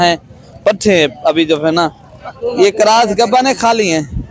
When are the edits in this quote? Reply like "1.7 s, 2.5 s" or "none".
none